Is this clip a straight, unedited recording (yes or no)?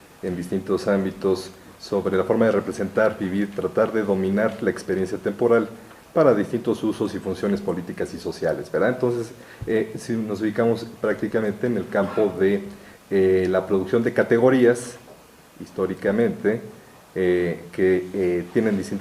no